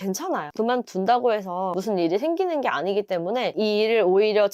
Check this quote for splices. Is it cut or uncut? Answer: cut